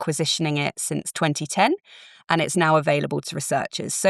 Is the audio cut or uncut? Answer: uncut